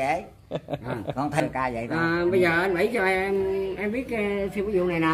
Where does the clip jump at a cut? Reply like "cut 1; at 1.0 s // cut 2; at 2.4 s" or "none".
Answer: cut 1; at 1.4 s